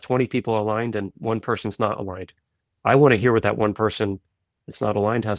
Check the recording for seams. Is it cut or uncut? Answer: uncut